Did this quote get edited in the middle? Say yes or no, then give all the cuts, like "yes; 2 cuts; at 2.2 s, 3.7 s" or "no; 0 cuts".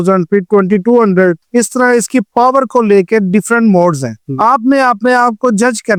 no; 0 cuts